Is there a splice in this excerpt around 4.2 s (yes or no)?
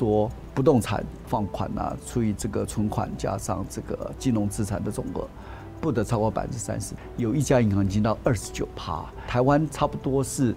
no